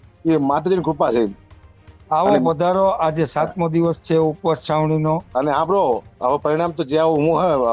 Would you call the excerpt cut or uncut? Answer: cut